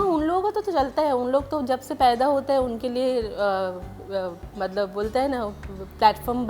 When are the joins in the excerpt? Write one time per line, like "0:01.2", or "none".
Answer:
none